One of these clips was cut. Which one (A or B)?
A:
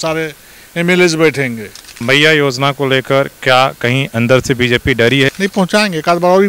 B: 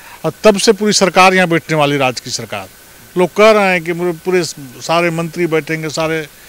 A